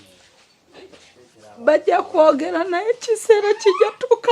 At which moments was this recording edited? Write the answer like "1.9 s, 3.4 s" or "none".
1.1 s